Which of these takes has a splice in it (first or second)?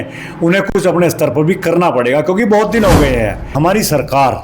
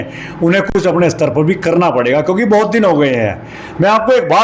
first